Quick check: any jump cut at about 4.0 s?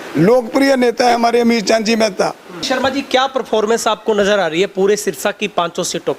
no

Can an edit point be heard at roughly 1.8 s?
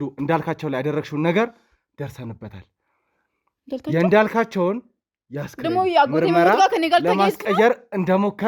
no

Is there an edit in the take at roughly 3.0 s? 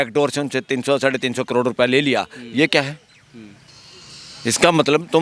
no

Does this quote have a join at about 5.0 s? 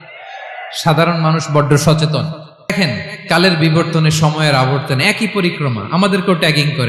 no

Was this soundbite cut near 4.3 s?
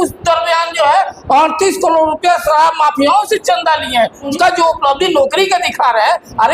yes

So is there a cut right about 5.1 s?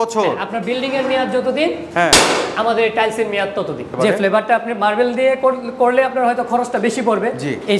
no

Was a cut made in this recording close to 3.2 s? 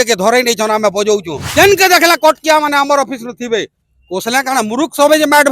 no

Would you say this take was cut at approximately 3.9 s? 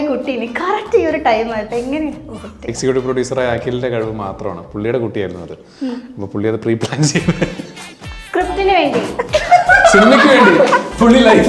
no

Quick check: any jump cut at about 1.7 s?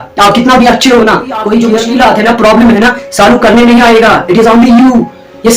yes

